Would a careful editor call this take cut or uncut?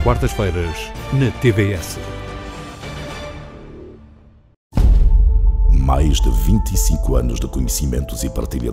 cut